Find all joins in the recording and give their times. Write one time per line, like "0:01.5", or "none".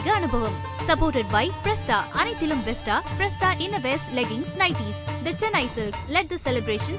none